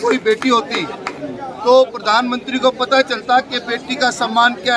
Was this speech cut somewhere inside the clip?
no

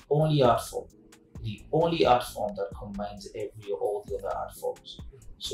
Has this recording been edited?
no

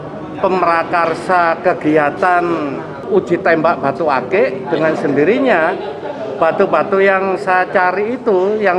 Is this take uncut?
no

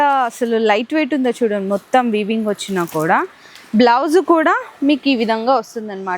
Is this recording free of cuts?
yes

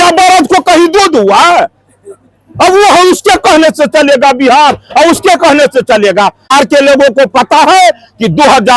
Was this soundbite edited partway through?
yes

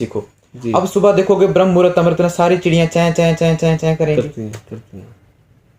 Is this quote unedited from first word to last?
yes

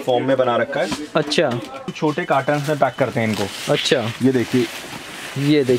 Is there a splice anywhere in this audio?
yes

